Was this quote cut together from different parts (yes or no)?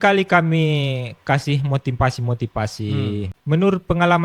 yes